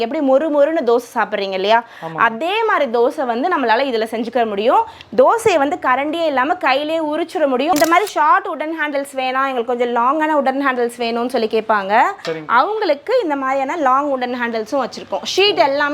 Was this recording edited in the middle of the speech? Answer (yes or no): yes